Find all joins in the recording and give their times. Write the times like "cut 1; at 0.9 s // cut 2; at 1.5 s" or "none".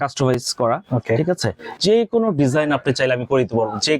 cut 1; at 1.8 s